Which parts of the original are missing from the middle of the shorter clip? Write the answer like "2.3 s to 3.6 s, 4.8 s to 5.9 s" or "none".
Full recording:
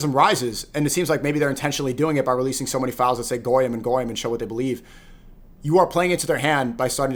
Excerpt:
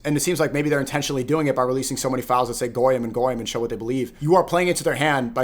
4.8 s to 5.6 s